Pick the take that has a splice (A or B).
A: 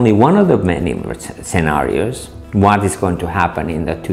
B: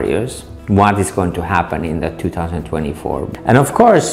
B